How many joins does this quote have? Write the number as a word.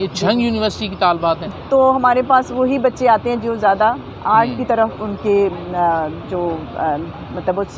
one